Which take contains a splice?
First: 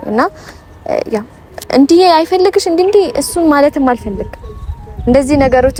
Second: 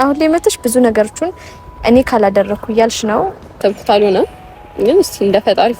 second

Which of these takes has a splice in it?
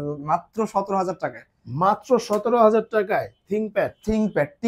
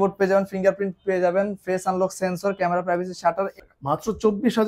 second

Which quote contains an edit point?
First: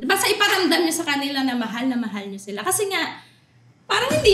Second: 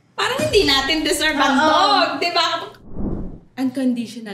second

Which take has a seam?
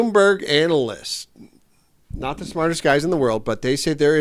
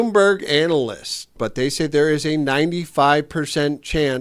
second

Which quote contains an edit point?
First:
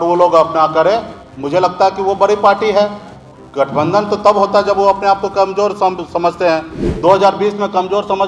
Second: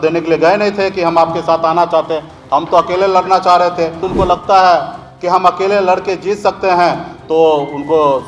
second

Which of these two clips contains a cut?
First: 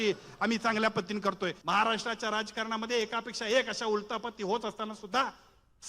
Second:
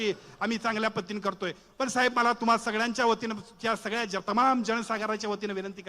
first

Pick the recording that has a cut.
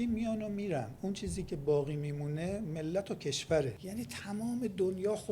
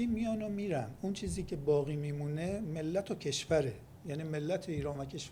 first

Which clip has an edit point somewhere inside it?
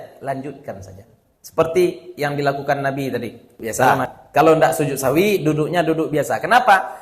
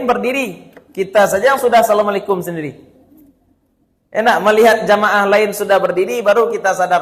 first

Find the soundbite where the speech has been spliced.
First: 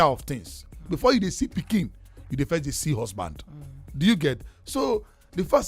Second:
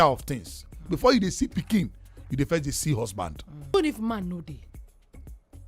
second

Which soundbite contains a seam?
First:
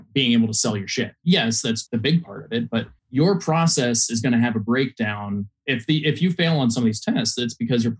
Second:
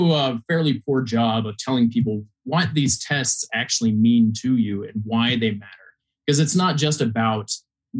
first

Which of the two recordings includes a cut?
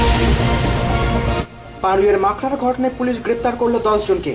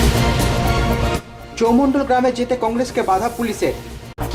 first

